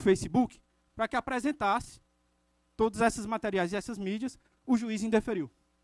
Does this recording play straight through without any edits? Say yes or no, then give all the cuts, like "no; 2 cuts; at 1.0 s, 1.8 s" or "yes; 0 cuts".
yes; 0 cuts